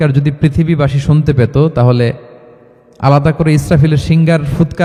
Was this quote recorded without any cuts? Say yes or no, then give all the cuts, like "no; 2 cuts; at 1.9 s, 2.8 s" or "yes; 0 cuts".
yes; 0 cuts